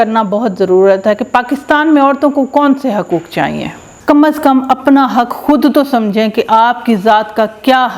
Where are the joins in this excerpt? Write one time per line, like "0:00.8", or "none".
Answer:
0:03.9